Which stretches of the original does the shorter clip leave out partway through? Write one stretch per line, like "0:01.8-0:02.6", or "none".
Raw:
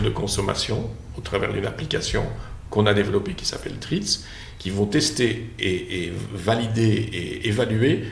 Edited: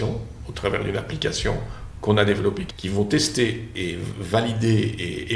0:03.4-0:04.5
0:05.5-0:05.9